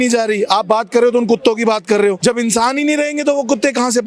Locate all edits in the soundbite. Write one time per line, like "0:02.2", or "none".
0:02.2